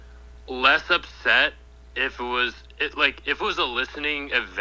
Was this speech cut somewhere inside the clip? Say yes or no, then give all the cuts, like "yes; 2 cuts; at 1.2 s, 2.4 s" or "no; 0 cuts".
no; 0 cuts